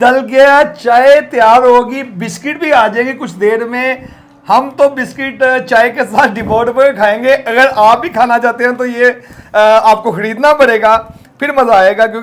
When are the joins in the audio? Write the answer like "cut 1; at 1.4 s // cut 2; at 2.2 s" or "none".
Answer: none